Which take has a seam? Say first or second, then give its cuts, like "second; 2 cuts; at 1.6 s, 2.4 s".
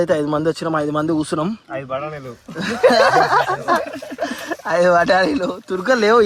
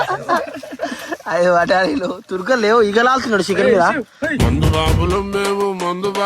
second; 1 cut; at 4.3 s